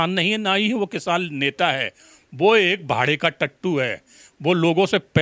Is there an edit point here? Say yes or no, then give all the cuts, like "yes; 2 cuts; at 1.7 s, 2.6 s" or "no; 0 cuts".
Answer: no; 0 cuts